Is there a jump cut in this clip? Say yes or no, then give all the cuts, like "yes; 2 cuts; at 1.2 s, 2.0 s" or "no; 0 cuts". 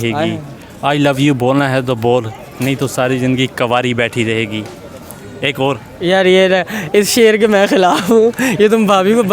no; 0 cuts